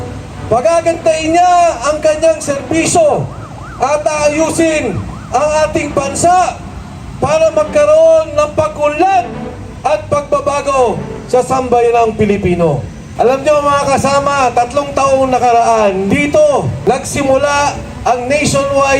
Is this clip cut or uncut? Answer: cut